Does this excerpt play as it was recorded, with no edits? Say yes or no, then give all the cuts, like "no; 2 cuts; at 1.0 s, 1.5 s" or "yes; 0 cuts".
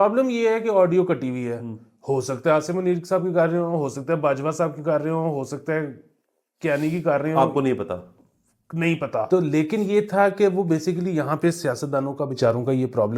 no; 1 cut; at 9.3 s